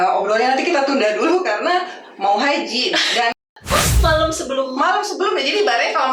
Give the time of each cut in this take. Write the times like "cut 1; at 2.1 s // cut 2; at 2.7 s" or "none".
cut 1; at 3.4 s